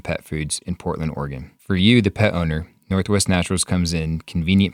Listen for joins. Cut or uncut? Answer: cut